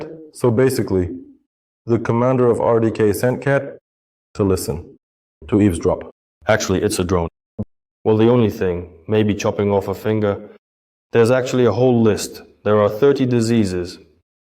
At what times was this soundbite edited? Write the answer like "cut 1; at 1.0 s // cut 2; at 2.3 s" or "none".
cut 1; at 7.5 s